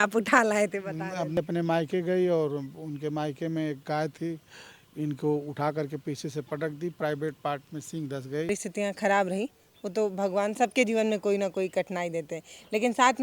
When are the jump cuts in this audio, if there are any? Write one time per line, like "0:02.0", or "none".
0:01.4
0:08.5